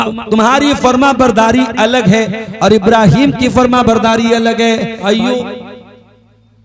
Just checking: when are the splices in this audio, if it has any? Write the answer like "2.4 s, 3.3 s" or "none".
5.0 s